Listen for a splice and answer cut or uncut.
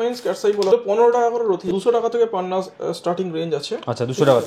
cut